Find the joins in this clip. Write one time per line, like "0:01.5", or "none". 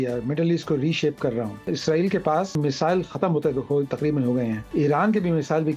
0:01.6
0:02.6
0:04.6